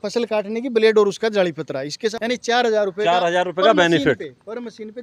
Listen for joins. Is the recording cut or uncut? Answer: cut